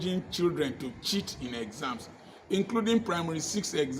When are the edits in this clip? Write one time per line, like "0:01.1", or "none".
none